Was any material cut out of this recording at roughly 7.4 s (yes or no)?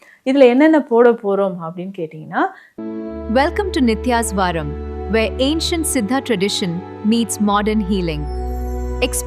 no